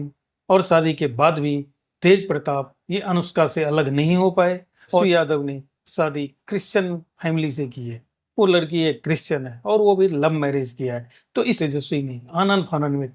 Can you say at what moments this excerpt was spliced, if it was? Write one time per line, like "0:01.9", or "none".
0:05.0
0:11.6